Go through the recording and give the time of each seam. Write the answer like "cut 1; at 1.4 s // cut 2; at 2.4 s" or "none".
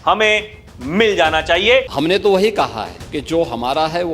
cut 1; at 1.9 s // cut 2; at 2.9 s